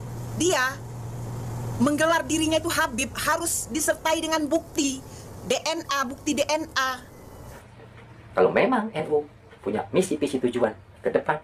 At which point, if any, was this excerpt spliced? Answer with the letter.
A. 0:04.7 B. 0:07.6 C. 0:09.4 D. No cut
B